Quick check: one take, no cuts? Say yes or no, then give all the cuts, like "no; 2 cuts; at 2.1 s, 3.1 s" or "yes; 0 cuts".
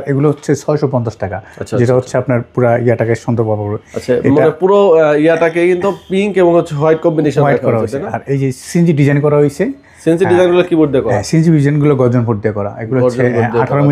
yes; 0 cuts